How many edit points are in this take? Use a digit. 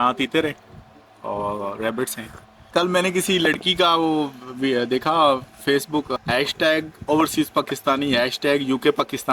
2